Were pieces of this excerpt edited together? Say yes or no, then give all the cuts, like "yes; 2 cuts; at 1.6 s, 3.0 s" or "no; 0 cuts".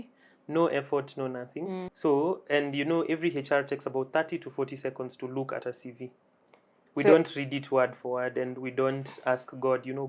yes; 1 cut; at 1.9 s